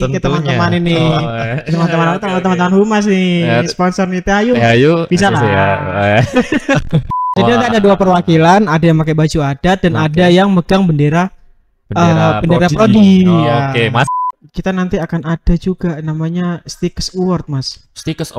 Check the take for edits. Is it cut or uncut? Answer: cut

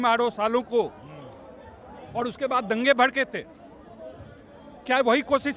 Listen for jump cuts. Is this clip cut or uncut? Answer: uncut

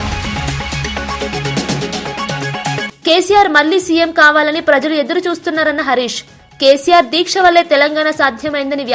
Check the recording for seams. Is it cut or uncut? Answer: cut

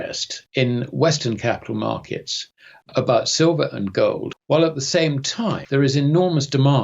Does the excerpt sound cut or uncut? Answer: cut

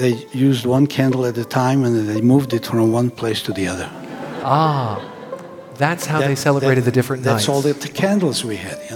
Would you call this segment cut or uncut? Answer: uncut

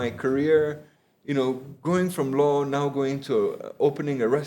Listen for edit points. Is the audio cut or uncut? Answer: uncut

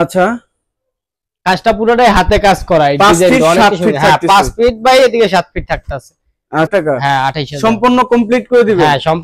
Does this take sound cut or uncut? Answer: cut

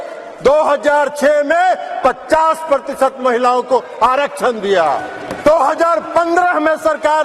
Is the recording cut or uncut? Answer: cut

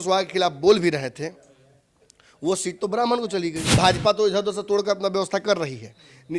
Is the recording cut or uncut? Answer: cut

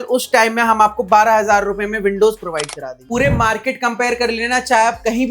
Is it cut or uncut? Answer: cut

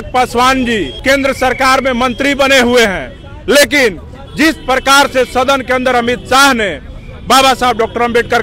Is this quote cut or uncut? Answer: cut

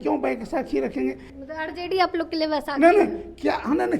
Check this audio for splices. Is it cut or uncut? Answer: cut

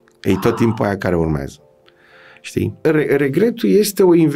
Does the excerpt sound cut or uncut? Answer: cut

